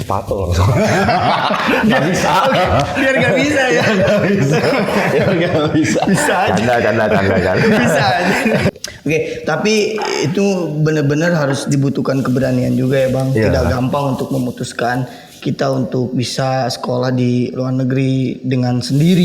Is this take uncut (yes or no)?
yes